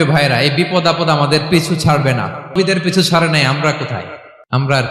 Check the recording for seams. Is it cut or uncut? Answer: cut